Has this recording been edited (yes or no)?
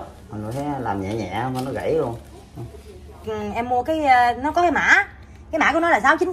yes